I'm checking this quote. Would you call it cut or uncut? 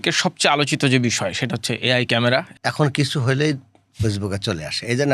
cut